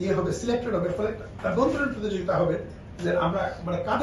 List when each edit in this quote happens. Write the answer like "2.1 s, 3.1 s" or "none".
none